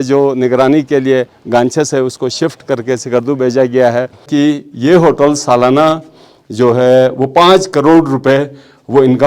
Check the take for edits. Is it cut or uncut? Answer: cut